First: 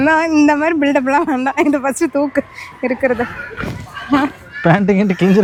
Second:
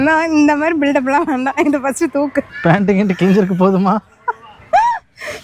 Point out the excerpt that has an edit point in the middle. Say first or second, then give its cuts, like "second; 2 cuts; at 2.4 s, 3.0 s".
second; 1 cut; at 2.5 s